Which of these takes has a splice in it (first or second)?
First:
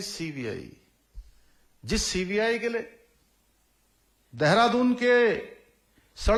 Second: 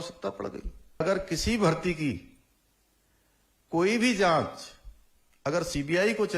second